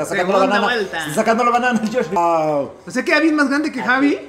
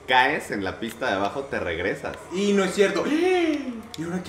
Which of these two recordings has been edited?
first; 1 cut; at 2.2 s

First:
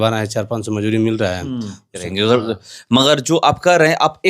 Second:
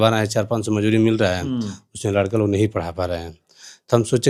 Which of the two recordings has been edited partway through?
first; 1 cut; at 2.0 s

